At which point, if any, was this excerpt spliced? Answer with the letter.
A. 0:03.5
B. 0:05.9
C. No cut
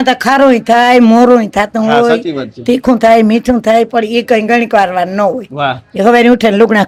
C